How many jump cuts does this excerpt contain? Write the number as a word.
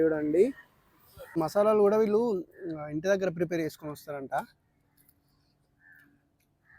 one